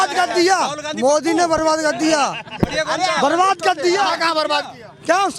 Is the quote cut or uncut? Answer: uncut